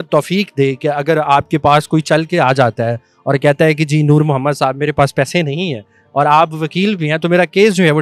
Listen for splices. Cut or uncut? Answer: uncut